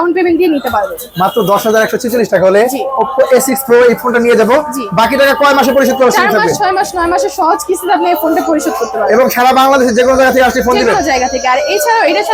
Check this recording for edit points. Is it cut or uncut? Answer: uncut